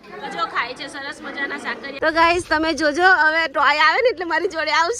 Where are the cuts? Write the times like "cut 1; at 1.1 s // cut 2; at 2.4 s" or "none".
cut 1; at 2.0 s